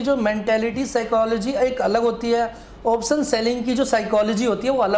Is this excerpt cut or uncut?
uncut